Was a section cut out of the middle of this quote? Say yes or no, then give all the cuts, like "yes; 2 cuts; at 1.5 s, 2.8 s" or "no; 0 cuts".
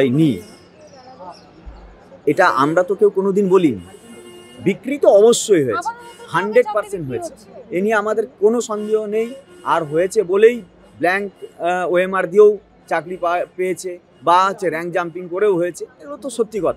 no; 0 cuts